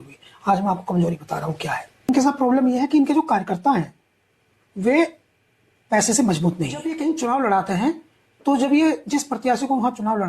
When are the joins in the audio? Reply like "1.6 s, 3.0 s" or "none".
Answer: 2.1 s, 6.9 s